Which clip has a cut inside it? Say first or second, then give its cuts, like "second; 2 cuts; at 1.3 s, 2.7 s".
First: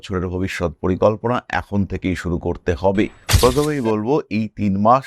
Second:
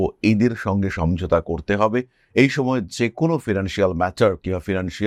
first; 1 cut; at 3.2 s